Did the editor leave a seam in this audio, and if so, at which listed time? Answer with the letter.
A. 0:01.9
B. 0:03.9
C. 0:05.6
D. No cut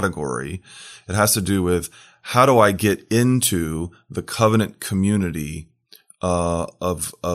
D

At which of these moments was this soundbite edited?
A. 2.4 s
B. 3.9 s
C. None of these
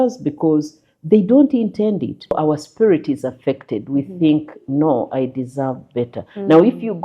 A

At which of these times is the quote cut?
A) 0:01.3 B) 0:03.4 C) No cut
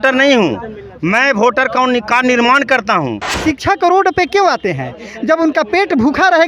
B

